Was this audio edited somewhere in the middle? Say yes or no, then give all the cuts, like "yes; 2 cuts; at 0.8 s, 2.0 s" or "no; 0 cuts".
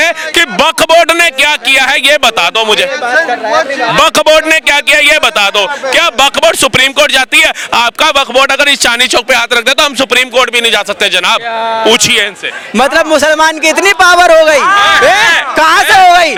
no; 0 cuts